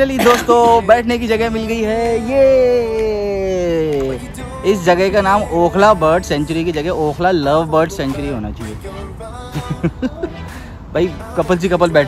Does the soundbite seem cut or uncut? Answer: uncut